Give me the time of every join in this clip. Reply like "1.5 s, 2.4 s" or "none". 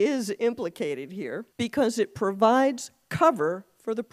1.4 s